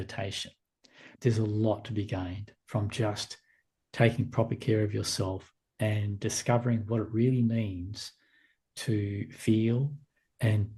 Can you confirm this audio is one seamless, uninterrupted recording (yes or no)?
no